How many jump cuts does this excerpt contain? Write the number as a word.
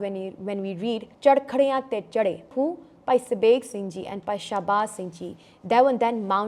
two